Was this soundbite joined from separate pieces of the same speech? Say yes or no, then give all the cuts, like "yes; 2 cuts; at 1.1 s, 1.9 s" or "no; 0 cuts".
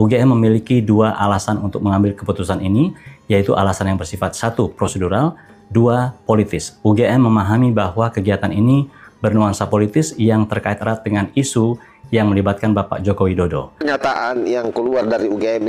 yes; 1 cut; at 13.8 s